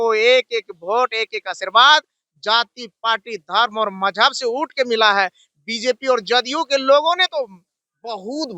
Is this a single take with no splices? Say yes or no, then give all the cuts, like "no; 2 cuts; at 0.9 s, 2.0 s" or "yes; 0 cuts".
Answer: yes; 0 cuts